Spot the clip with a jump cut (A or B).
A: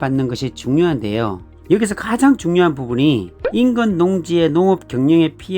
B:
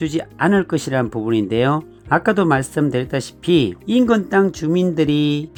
A